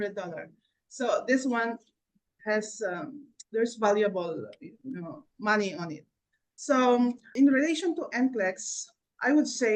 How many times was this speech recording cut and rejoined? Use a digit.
0